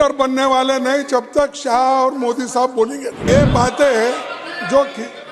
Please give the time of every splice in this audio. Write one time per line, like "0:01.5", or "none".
0:03.2